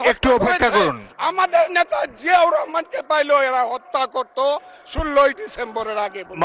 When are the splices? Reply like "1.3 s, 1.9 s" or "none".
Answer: none